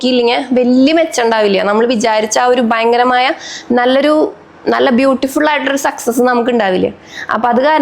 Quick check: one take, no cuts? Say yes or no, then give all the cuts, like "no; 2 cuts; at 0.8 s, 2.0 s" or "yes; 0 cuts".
yes; 0 cuts